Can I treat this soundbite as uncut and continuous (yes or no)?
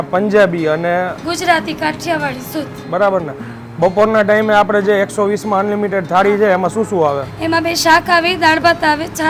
yes